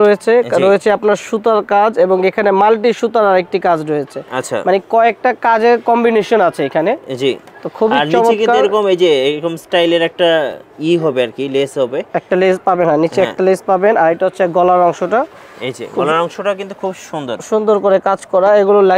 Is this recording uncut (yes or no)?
yes